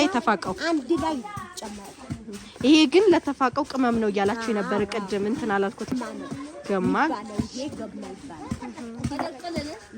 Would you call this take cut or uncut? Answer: cut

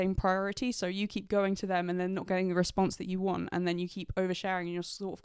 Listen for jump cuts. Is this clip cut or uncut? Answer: uncut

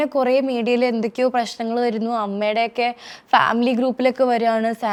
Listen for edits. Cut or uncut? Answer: uncut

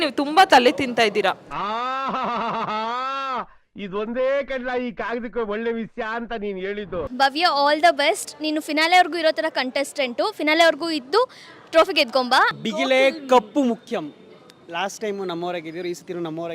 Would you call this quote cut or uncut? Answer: cut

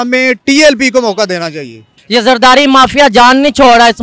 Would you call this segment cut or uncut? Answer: cut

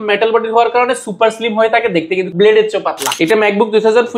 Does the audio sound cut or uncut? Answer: cut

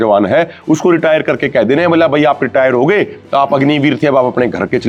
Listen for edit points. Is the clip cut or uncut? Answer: uncut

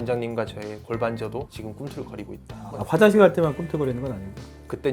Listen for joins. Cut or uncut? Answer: cut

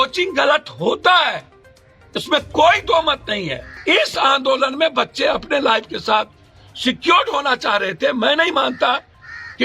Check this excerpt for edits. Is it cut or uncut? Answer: cut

